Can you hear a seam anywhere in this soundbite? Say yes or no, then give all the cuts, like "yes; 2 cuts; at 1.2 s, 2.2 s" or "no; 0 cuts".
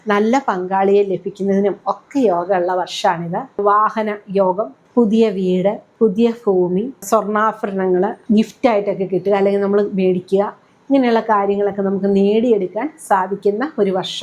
yes; 5 cuts; at 3.6 s, 4.8 s, 5.9 s, 7.0 s, 8.2 s